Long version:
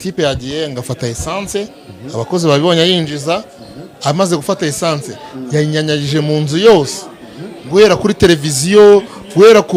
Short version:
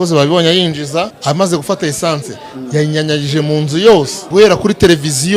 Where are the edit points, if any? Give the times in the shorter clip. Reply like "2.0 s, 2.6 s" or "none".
1.1 s, 3.9 s